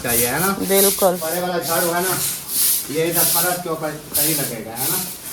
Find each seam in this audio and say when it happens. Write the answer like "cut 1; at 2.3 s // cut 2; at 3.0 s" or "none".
cut 1; at 1.2 s